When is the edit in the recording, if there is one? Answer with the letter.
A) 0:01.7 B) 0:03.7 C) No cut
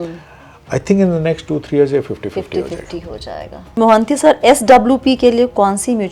B